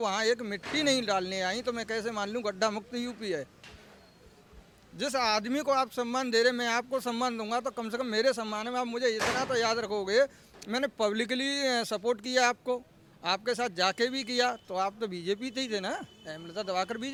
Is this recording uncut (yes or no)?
yes